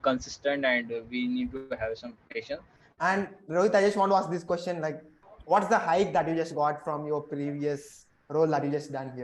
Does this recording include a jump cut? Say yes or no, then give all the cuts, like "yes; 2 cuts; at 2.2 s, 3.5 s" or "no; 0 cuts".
yes; 1 cut; at 2.8 s